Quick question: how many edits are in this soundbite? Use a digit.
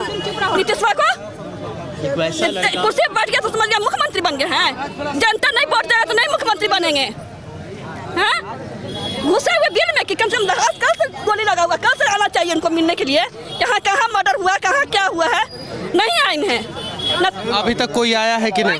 0